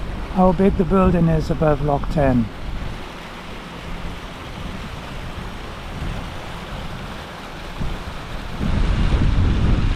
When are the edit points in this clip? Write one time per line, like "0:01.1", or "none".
none